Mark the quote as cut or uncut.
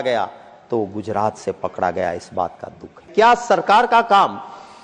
cut